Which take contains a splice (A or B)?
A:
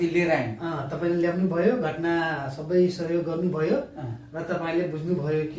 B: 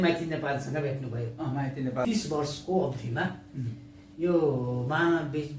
B